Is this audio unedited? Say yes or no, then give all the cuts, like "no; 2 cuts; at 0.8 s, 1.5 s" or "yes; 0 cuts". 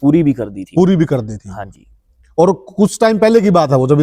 yes; 0 cuts